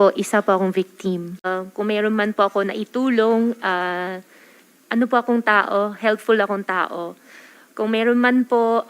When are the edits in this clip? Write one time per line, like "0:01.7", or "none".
0:01.4